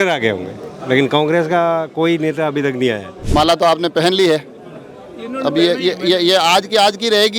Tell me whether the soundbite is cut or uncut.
cut